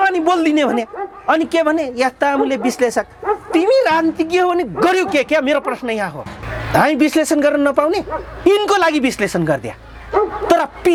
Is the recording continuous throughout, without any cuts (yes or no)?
yes